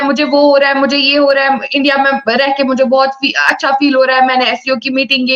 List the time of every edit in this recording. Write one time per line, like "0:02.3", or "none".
none

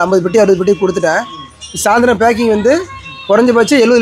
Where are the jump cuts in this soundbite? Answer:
none

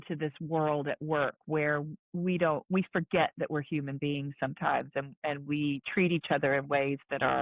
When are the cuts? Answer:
none

